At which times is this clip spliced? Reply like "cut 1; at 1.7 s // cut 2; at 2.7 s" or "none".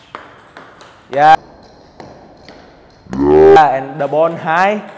none